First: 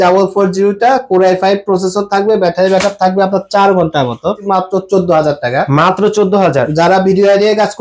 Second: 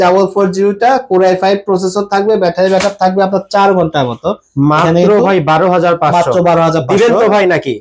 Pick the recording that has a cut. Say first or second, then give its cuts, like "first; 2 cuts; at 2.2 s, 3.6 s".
first; 1 cut; at 4.4 s